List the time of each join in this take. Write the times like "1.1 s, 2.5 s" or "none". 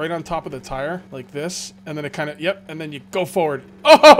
1.1 s